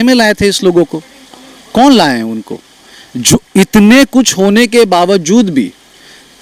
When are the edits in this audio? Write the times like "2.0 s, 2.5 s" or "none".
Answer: none